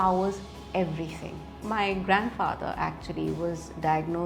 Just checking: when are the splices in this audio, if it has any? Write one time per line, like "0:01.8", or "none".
0:01.6

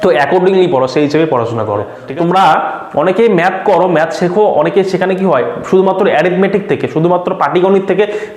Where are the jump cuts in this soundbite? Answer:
0:02.0

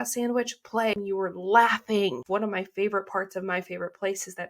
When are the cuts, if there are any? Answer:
0:01.0
0:02.2

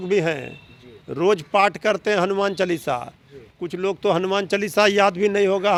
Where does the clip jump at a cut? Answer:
none

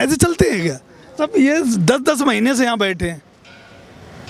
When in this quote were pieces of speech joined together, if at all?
0:01.2

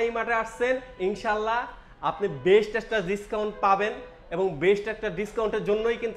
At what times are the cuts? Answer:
none

